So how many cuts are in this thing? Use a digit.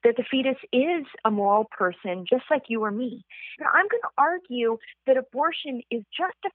1